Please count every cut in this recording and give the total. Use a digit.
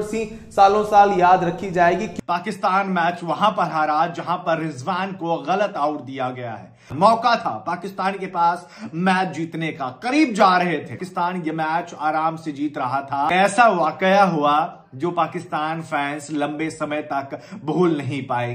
4